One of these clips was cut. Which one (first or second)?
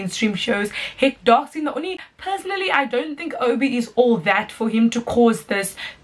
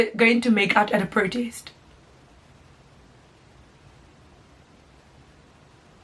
first